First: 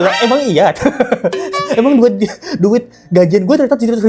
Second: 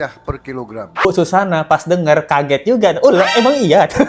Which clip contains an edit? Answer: second; 1 cut; at 1.0 s

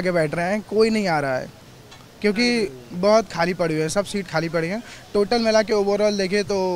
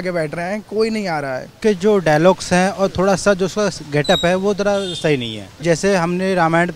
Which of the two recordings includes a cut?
second; 2 cuts; at 1.6 s, 5.6 s

